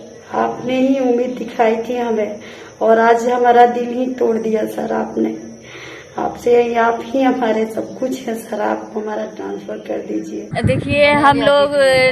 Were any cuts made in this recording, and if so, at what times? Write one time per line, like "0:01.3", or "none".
0:10.5